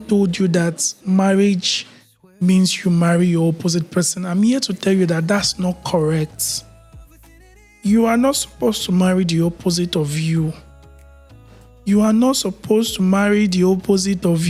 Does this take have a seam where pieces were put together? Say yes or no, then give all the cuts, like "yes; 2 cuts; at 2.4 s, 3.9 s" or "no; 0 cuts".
no; 0 cuts